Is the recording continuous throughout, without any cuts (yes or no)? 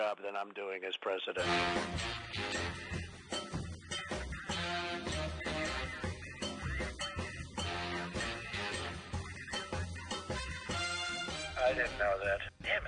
no